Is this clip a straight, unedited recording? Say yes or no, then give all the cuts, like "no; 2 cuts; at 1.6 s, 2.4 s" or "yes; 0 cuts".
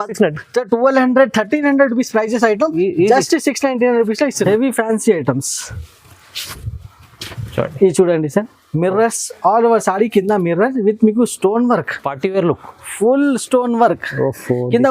no; 1 cut; at 4.4 s